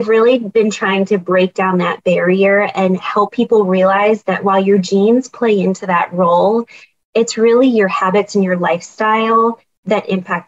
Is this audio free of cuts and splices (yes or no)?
yes